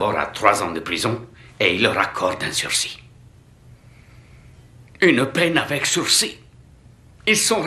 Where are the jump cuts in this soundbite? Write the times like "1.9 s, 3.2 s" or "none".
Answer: none